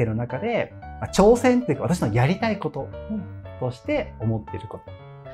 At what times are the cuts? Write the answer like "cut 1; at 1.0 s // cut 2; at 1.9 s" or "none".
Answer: none